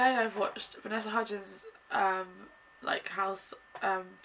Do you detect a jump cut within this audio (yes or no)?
no